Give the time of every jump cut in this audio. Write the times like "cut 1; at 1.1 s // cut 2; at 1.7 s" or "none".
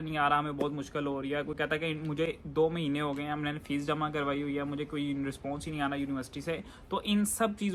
none

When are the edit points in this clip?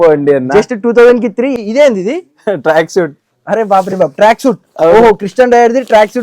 cut 1; at 1.5 s

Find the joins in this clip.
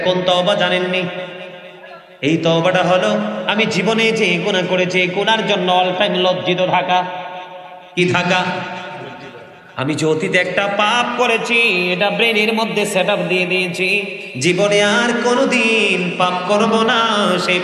none

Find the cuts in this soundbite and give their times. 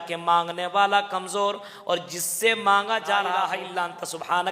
cut 1; at 3.5 s

